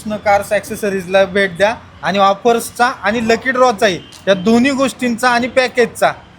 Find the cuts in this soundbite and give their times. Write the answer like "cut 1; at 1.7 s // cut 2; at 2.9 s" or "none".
none